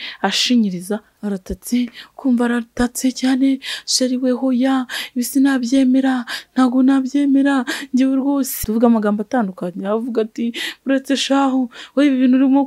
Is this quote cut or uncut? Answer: cut